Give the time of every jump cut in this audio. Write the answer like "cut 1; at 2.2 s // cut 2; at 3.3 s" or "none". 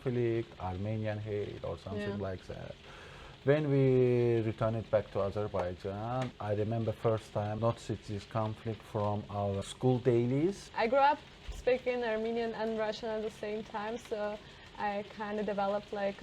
cut 1; at 6.3 s // cut 2; at 7.6 s // cut 3; at 9.6 s // cut 4; at 10.7 s